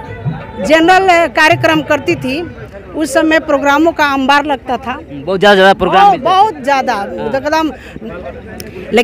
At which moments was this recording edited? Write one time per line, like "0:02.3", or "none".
0:07.9